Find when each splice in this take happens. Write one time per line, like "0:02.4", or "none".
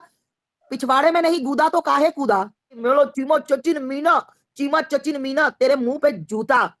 0:02.8